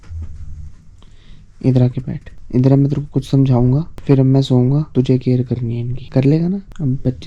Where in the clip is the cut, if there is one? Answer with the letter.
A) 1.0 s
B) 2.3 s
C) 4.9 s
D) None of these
D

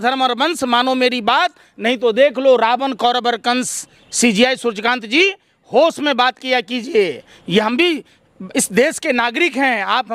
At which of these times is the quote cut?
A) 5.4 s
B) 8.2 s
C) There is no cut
C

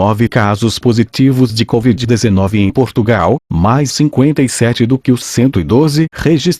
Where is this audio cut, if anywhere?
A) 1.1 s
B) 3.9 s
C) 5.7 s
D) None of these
A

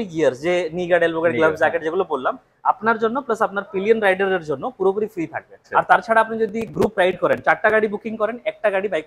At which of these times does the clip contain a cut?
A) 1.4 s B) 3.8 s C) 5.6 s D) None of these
C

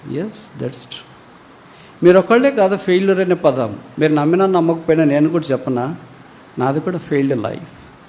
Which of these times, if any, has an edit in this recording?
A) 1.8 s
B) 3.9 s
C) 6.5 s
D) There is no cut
D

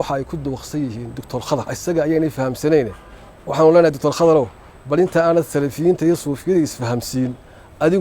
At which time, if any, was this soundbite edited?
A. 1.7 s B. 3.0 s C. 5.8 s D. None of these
A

